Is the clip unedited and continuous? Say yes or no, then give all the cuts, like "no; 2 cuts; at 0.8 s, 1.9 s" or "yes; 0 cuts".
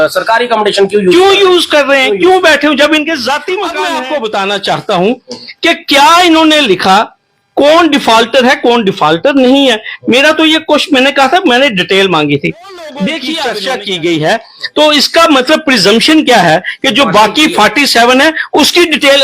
no; 2 cuts; at 3.7 s, 13.5 s